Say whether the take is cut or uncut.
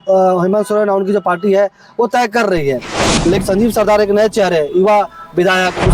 cut